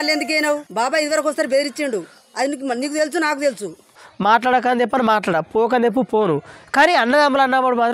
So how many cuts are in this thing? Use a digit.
1